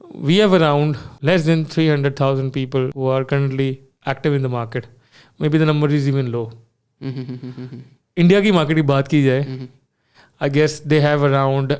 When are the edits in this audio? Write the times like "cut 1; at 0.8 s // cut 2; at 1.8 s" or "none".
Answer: cut 1; at 1.1 s // cut 2; at 2.9 s

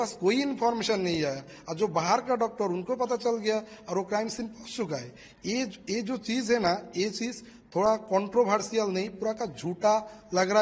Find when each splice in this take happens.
none

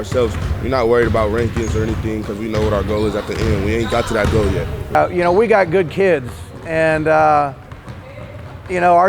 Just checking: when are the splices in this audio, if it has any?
cut 1; at 4.9 s

